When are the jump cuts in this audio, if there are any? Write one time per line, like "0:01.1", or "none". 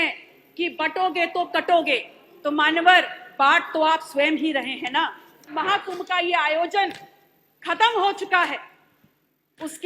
0:05.5